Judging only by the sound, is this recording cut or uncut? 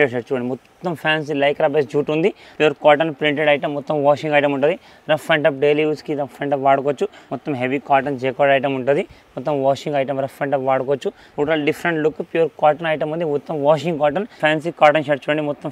cut